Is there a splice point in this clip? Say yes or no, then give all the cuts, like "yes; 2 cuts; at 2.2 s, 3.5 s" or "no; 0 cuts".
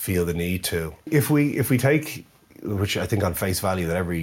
yes; 1 cut; at 1.1 s